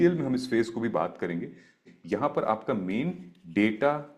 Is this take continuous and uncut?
no; 1 cut; at 1.8 s

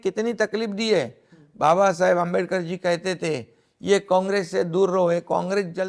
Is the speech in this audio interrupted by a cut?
no; 0 cuts

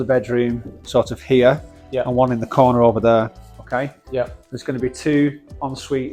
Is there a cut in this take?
no; 0 cuts

